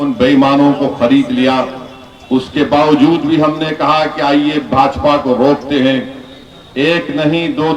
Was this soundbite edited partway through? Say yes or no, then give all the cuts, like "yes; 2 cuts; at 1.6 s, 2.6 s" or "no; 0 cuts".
no; 0 cuts